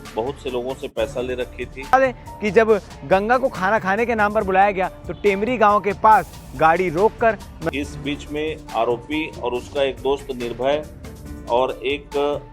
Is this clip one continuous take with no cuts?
no; 2 cuts; at 1.9 s, 7.5 s

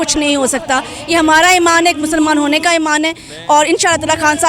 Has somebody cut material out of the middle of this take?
no; 0 cuts

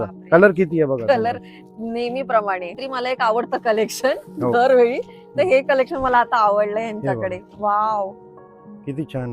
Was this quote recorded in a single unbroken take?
no; 1 cut; at 2.7 s

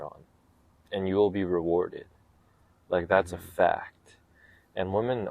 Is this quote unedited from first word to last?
yes; 0 cuts

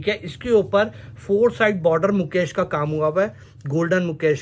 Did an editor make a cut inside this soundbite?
no; 0 cuts

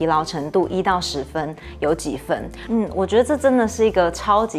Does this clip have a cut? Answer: yes; 1 cut; at 2.5 s

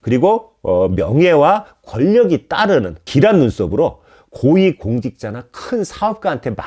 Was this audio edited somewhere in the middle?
yes; 1 cut; at 3.1 s

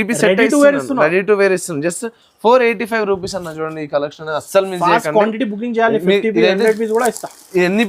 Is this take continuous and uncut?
yes; 0 cuts

